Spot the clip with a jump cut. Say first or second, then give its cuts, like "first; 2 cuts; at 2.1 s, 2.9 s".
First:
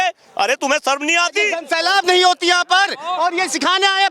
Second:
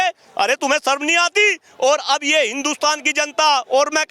first; 1 cut; at 1.6 s